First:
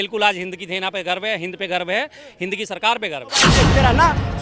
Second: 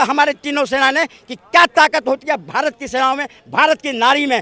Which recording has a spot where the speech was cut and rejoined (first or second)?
first